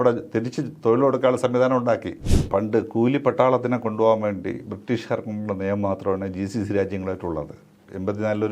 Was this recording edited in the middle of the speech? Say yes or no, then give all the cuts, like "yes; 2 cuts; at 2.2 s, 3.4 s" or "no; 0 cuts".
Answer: yes; 1 cut; at 2.4 s